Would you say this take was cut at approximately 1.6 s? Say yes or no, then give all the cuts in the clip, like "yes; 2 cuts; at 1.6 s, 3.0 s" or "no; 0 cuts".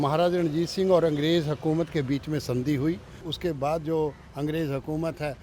no; 1 cut; at 3.2 s